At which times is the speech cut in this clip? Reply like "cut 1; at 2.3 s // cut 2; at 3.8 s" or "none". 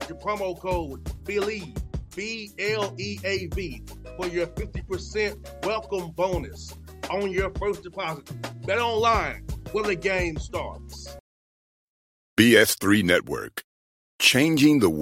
cut 1; at 11.1 s